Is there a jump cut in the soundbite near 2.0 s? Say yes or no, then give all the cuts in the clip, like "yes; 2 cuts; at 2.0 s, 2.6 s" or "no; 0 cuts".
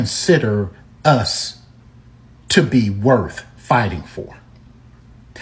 no; 1 cut; at 4.4 s